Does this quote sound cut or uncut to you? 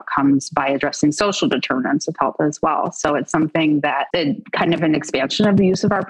cut